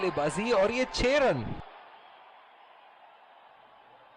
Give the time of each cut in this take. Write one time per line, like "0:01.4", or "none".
0:01.6
0:03.1